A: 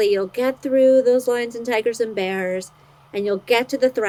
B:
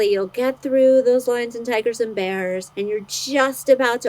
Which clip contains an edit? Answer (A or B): B